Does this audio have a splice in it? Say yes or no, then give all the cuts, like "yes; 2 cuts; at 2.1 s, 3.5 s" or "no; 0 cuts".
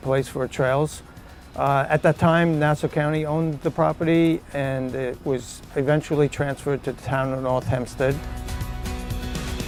no; 0 cuts